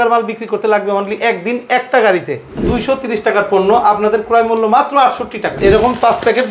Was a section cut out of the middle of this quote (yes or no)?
yes